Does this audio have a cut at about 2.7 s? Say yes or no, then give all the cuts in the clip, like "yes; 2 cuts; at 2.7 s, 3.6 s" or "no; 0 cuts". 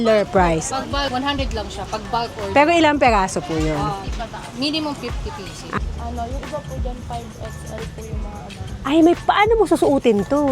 no; 2 cuts; at 1.1 s, 5.8 s